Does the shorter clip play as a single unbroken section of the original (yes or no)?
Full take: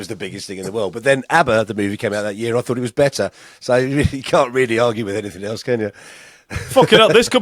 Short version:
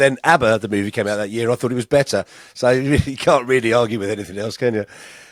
yes